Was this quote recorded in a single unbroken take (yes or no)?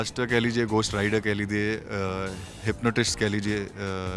yes